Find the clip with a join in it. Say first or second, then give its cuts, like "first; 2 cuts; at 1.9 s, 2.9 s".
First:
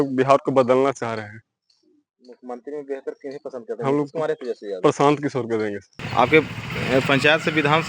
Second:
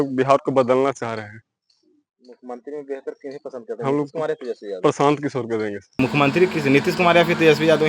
second; 1 cut; at 6.0 s